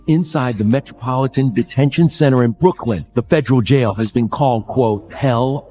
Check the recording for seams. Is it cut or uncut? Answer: uncut